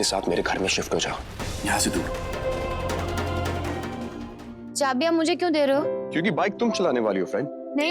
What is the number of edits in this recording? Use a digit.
1